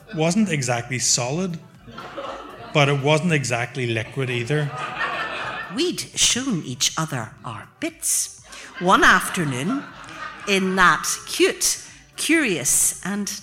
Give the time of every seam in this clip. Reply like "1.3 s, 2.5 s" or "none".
5.6 s